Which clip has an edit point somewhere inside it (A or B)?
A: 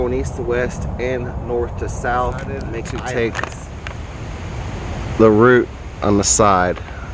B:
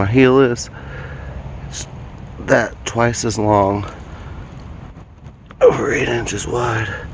A